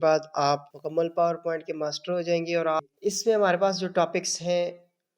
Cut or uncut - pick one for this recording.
cut